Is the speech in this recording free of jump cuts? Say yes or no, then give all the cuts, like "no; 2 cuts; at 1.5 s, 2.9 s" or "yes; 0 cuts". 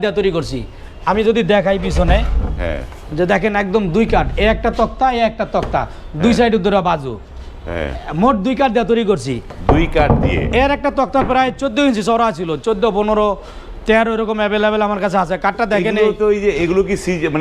yes; 0 cuts